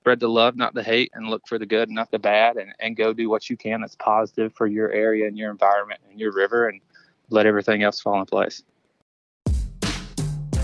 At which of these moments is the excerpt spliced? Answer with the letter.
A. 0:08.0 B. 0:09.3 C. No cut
B